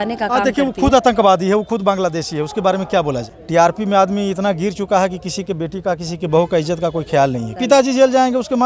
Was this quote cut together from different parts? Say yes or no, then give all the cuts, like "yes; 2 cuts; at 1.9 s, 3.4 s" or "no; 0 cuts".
yes; 2 cuts; at 3.3 s, 7.6 s